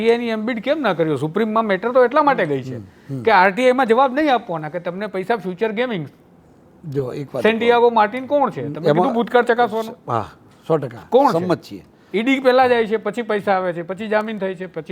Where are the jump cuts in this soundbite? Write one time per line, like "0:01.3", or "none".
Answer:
none